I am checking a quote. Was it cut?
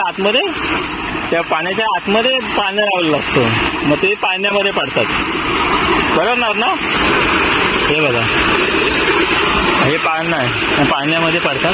no; 0 cuts

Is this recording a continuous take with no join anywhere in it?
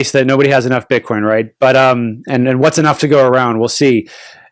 yes; 0 cuts

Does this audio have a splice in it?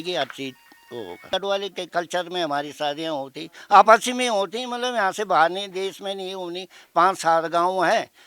yes; 1 cut; at 1.3 s

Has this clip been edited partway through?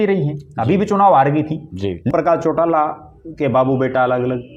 yes; 1 cut; at 2.1 s

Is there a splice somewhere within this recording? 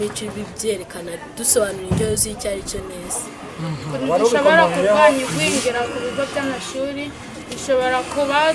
no; 0 cuts

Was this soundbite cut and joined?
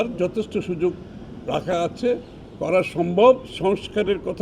yes; 1 cut; at 3.5 s

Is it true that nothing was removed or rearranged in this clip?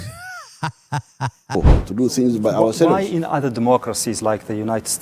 no; 1 cut; at 1.5 s

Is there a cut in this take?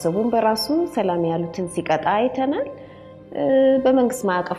no; 0 cuts

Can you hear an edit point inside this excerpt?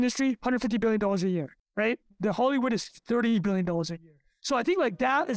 no; 0 cuts

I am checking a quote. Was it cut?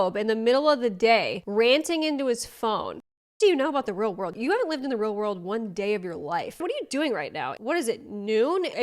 yes; 3 cuts; at 1.4 s, 3.0 s, 6.6 s

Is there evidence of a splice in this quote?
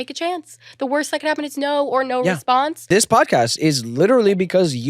yes; 1 cut; at 2.8 s

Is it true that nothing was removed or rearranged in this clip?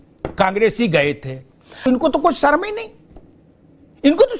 no; 1 cut; at 1.9 s

